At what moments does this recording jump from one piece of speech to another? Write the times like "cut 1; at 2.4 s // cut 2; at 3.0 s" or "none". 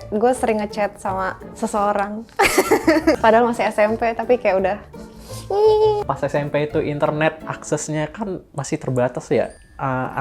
cut 1; at 3.2 s // cut 2; at 6.0 s